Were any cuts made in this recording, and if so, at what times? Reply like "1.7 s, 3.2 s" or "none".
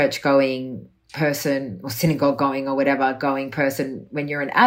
none